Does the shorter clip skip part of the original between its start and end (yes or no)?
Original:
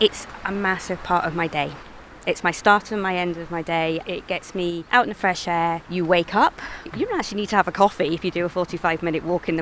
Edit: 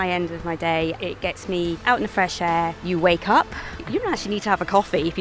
no